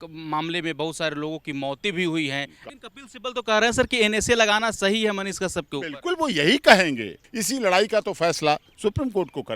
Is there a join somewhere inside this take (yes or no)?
yes